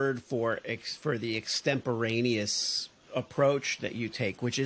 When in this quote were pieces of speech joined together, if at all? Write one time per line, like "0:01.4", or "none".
none